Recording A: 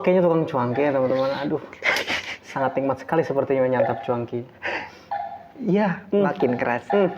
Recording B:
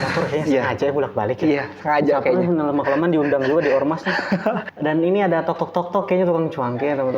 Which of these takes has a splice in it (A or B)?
B